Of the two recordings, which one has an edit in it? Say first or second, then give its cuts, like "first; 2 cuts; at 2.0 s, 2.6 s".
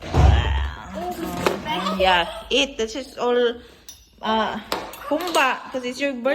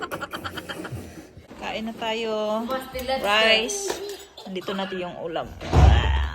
second; 1 cut; at 1.7 s